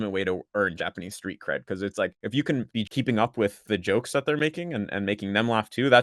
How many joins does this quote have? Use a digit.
1